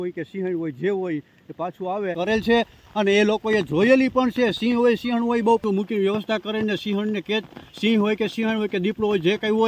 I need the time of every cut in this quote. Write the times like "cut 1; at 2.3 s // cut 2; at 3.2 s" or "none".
cut 1; at 2.2 s // cut 2; at 5.6 s